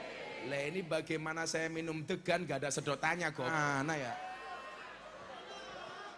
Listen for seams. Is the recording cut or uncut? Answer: cut